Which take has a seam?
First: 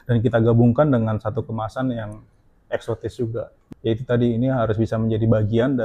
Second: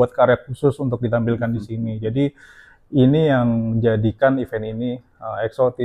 first; 1 cut; at 3.6 s

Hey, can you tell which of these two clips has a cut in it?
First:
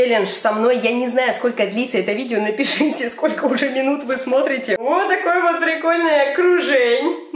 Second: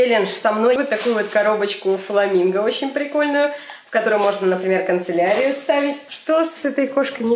second; 2 cuts; at 0.8 s, 6.1 s

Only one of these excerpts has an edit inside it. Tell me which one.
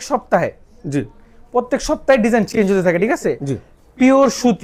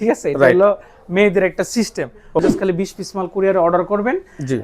second; 1 cut; at 2.4 s

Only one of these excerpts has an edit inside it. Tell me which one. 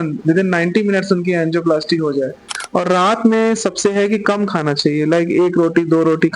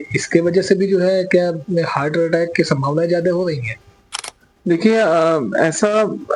first; 1 cut; at 2.6 s

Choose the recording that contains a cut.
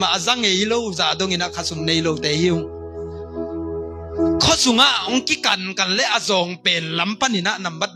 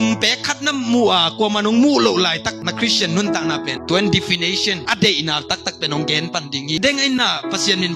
second; 2 cuts; at 3.8 s, 6.8 s

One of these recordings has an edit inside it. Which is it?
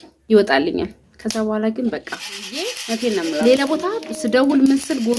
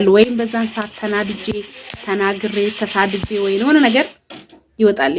first; 1 cut; at 2.8 s

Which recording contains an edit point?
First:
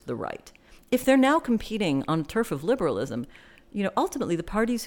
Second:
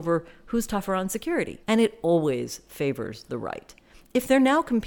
second; 1 cut; at 1.6 s

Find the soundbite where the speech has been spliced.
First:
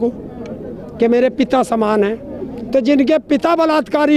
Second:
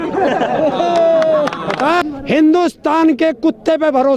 second; 1 cut; at 2.0 s

